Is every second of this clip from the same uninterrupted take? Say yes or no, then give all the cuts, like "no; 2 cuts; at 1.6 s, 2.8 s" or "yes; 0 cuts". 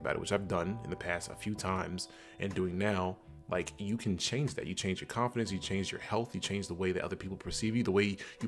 yes; 0 cuts